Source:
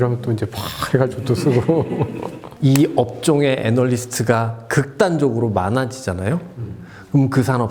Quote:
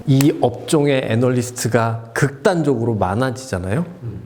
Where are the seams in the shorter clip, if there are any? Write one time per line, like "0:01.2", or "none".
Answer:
none

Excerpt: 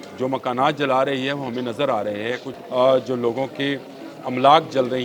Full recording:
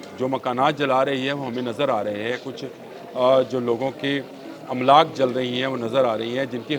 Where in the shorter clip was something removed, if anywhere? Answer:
0:02.5

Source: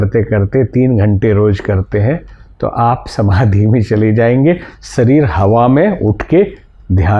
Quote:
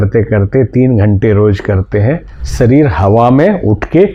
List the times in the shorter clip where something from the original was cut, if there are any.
0:02.4

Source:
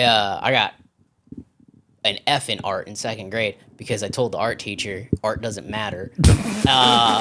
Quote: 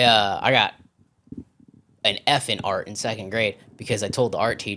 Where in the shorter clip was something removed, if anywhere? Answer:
none

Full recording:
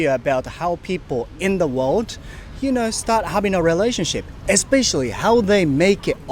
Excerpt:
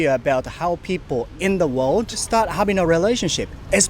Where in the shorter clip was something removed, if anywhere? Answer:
0:02.2

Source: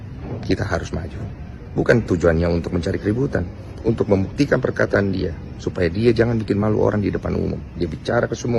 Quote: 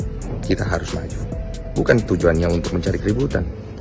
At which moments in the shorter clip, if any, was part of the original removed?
none

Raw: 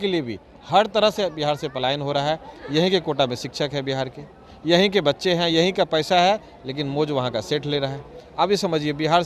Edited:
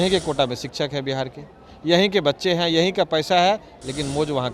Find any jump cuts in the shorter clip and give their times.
none

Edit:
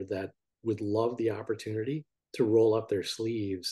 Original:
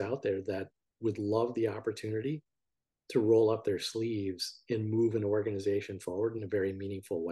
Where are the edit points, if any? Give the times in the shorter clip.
0:02.1

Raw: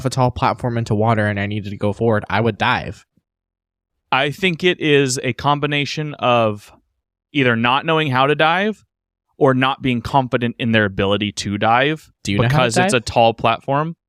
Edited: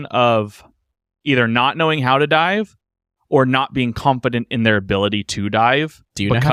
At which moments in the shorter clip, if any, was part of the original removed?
none

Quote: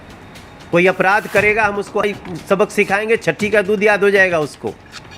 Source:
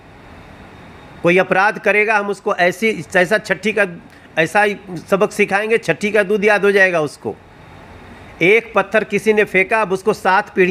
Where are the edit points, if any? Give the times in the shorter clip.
0:02.0

